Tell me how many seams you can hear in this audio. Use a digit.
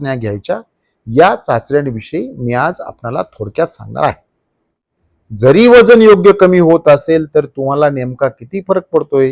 1